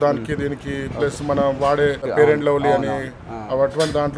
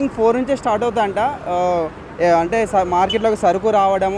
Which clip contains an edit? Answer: first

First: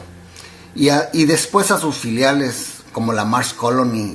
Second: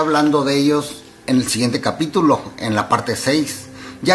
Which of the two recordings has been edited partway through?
first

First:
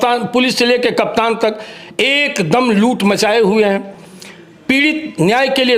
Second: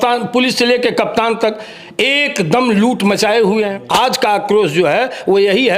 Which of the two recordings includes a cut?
second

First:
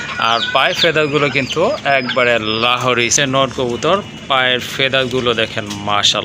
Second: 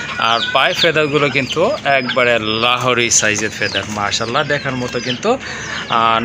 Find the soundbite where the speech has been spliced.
first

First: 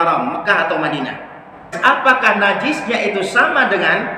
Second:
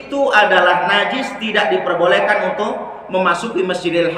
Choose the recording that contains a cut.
first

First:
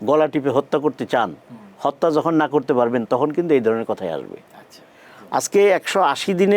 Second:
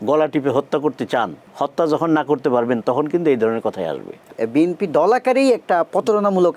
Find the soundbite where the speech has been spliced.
second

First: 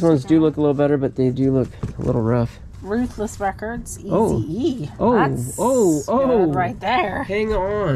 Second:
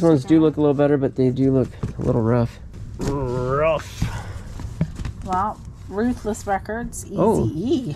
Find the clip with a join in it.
first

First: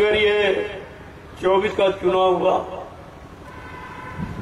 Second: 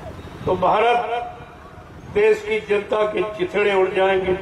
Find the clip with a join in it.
first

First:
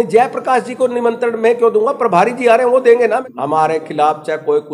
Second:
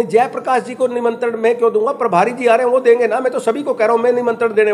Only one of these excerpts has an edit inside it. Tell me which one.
first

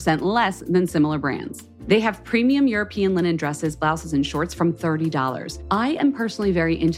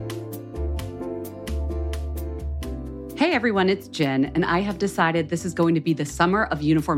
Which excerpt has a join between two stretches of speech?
second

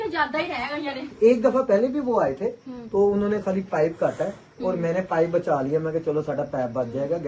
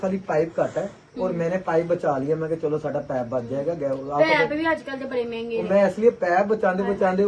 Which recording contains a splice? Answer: first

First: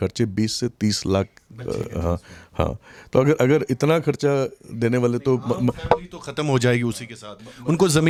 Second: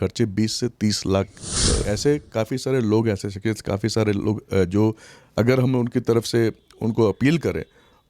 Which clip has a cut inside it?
second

